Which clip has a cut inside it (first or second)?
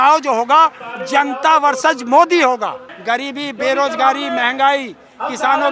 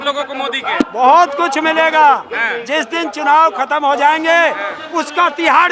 first